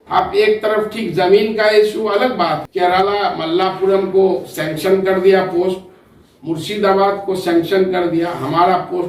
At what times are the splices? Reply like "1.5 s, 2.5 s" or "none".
2.7 s